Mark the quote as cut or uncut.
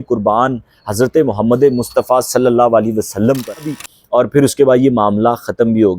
cut